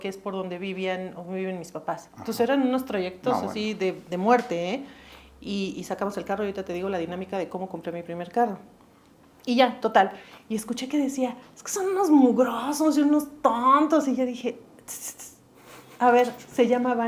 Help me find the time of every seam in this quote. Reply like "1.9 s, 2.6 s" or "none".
none